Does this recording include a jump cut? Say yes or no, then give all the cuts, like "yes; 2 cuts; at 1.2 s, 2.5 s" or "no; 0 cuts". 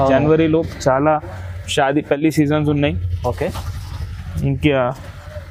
no; 0 cuts